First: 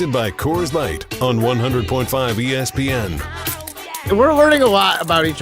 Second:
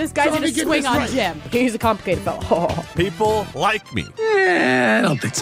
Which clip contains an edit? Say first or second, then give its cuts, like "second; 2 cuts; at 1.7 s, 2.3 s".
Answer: first; 1 cut; at 4.0 s